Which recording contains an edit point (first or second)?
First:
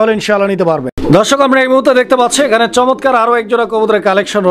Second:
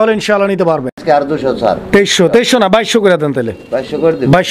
second